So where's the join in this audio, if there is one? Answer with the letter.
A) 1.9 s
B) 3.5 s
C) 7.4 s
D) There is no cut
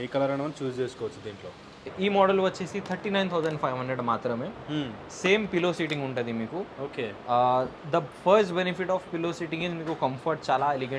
A